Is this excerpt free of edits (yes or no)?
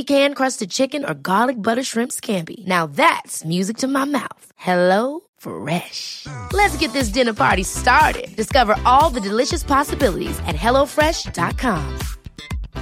yes